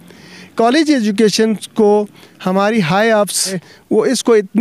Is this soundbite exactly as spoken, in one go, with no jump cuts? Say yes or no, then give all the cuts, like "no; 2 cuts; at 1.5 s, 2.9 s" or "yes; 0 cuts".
no; 1 cut; at 3.7 s